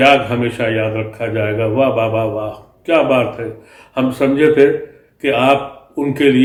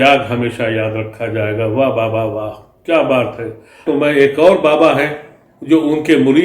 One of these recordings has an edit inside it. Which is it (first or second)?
second